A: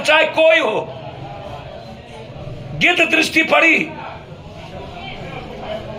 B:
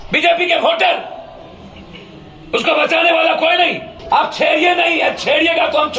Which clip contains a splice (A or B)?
B